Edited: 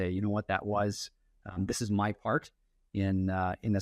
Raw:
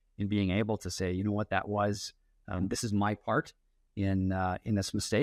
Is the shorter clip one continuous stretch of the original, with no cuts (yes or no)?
yes